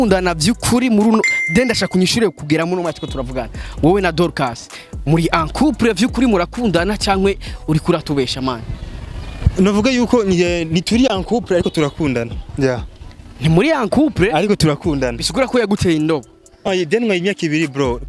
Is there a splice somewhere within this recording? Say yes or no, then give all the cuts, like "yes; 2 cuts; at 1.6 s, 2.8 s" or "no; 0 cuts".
yes; 1 cut; at 16.7 s